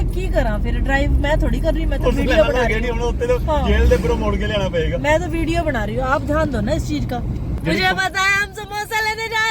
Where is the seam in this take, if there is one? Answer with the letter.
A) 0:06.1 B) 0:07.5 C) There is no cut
B